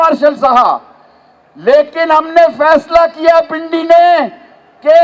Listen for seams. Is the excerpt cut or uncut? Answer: uncut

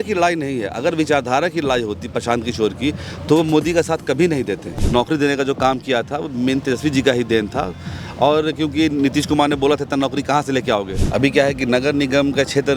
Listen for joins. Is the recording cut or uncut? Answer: cut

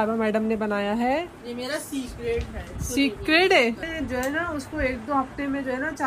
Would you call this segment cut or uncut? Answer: cut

